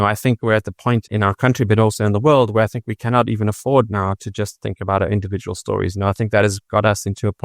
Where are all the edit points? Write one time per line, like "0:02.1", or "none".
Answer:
0:01.1